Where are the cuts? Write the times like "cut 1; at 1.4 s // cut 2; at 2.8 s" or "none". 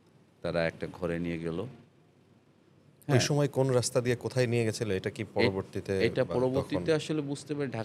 none